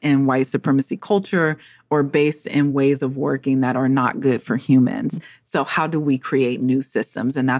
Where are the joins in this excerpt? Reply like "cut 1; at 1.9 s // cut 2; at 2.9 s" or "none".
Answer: none